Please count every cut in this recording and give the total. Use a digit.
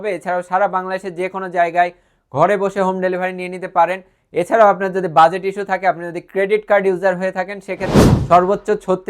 1